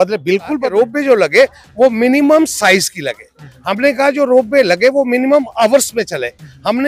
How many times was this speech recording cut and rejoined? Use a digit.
1